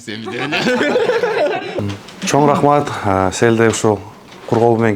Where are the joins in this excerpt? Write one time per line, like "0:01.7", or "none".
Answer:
0:01.7